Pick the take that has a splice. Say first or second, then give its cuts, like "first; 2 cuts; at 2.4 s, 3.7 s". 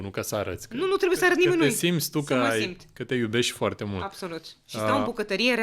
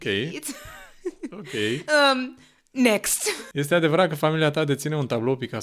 second; 1 cut; at 3.4 s